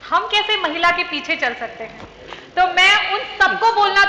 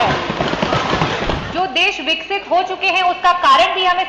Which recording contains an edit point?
second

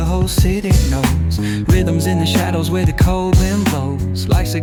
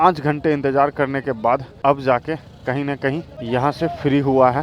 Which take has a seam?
second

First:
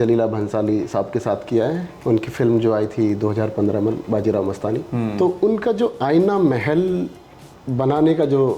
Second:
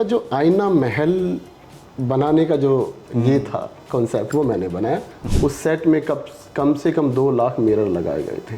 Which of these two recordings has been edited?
second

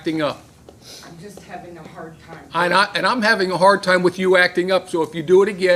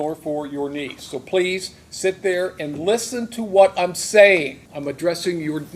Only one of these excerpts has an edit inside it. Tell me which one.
second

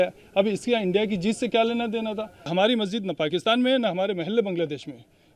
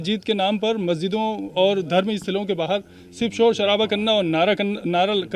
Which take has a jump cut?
first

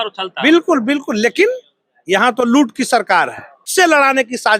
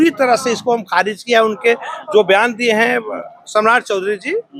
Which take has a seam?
first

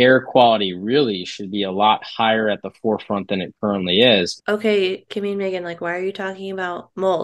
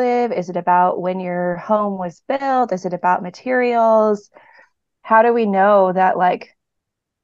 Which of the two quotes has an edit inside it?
first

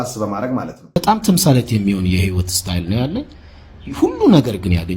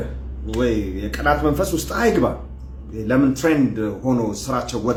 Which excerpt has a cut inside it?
first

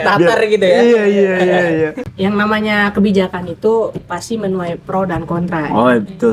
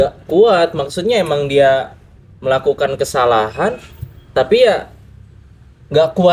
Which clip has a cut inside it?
first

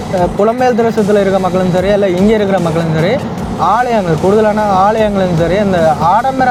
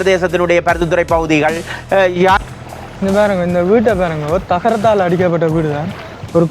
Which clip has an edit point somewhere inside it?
second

